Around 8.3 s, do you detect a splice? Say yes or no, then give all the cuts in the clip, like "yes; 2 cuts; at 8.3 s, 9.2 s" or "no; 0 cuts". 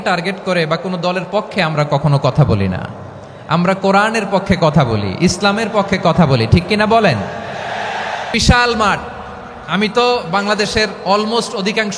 yes; 1 cut; at 8.3 s